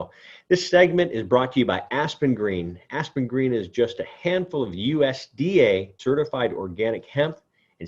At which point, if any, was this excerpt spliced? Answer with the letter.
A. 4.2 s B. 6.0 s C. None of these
B